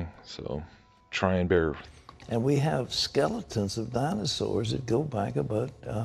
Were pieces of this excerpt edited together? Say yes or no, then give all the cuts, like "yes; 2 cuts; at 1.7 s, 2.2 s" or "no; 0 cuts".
no; 0 cuts